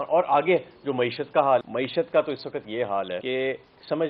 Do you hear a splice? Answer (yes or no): yes